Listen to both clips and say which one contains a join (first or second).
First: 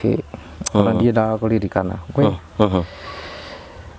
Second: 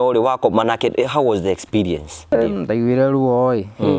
second